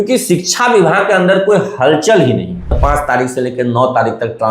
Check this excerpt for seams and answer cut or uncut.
cut